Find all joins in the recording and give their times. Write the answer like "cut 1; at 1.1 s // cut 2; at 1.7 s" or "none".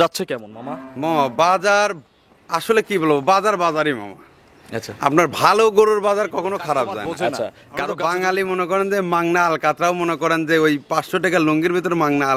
cut 1; at 7.6 s